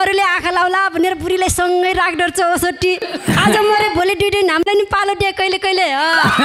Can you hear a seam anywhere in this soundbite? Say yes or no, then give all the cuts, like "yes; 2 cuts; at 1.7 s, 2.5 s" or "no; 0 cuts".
no; 0 cuts